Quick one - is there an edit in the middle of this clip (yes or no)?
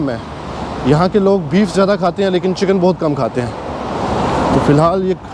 no